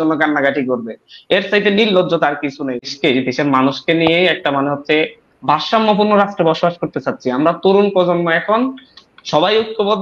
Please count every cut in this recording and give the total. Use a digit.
1